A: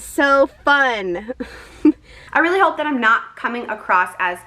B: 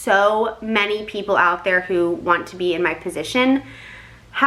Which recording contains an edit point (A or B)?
A